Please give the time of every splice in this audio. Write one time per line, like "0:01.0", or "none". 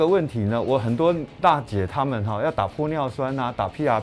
none